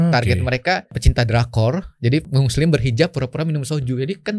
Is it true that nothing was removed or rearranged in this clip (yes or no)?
no